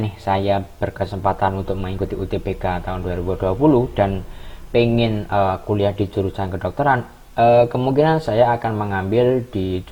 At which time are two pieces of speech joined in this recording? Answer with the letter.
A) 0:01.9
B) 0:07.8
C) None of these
C